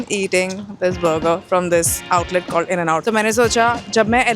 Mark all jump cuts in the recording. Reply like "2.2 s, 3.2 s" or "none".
3.0 s

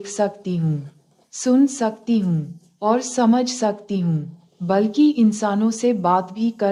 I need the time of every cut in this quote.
none

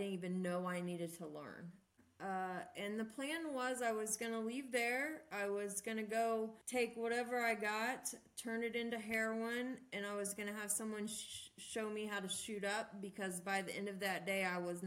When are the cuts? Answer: 2.0 s, 6.6 s

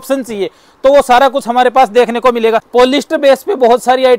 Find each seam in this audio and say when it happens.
2.6 s

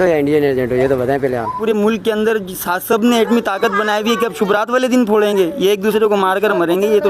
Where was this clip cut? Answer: 1.6 s

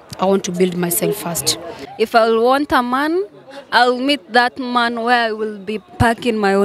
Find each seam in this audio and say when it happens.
1.8 s

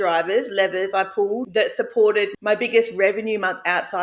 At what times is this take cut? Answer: 1.4 s, 2.3 s

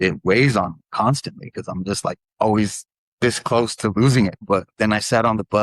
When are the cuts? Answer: 4.4 s

